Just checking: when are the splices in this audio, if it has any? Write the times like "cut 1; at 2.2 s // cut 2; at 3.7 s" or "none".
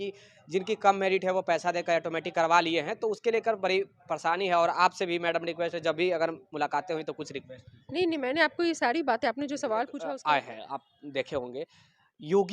cut 1; at 10.1 s